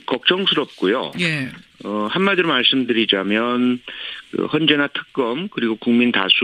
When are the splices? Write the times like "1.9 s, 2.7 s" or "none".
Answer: 1.1 s